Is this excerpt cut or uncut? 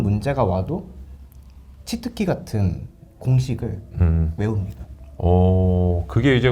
uncut